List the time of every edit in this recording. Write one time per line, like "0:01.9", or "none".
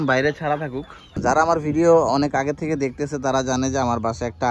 0:01.0